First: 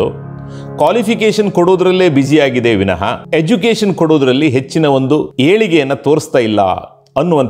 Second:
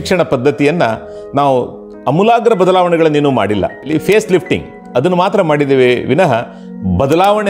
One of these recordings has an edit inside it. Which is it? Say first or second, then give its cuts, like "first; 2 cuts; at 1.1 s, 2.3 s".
first; 2 cuts; at 3.2 s, 5.3 s